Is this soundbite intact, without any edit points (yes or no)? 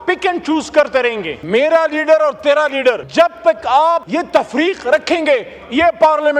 no